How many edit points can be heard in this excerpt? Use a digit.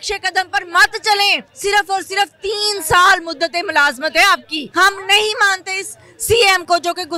2